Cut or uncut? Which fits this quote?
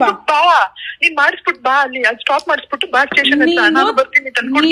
uncut